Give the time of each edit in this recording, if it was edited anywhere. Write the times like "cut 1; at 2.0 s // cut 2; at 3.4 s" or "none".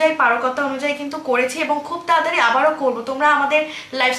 none